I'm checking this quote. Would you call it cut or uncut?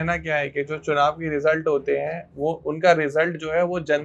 uncut